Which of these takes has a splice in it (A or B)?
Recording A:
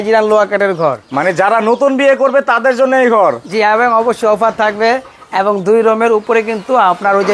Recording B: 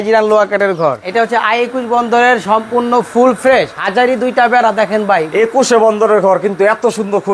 B